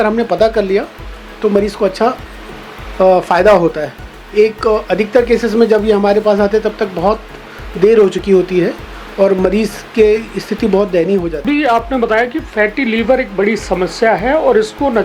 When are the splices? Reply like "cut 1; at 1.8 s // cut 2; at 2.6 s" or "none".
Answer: cut 1; at 11.4 s

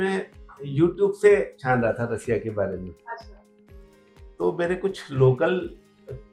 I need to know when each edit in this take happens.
none

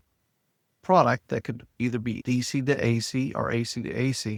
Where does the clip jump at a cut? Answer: none

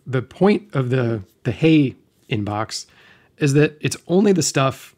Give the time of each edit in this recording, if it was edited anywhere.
none

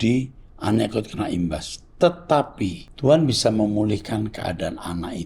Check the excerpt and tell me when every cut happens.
cut 1; at 2.8 s

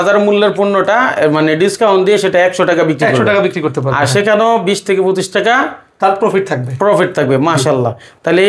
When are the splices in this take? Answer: none

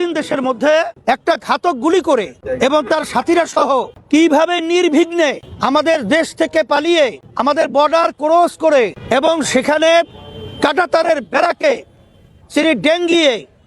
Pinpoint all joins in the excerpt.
cut 1; at 0.9 s // cut 2; at 2.4 s // cut 3; at 4.0 s // cut 4; at 5.5 s // cut 5; at 7.2 s // cut 6; at 9.0 s

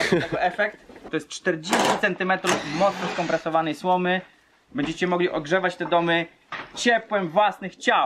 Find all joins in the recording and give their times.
cut 1; at 1.0 s // cut 2; at 4.6 s

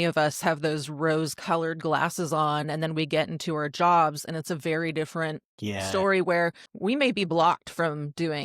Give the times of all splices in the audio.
cut 1; at 5.5 s // cut 2; at 6.7 s

